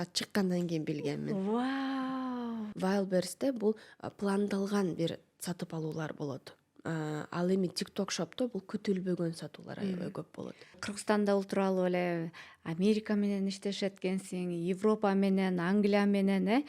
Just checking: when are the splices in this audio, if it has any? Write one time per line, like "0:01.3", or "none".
0:02.7
0:10.9